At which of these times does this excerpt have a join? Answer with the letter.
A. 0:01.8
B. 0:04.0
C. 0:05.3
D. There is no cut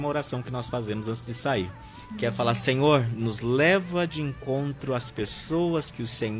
D